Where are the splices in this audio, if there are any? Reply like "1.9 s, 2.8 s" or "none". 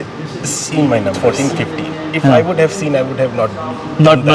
1.2 s